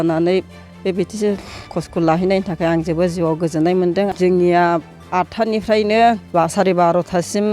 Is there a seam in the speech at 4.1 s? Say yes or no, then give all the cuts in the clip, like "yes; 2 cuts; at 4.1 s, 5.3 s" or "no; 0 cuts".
yes; 2 cuts; at 4.1 s, 6.2 s